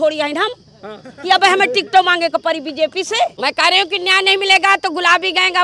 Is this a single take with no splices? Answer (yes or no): no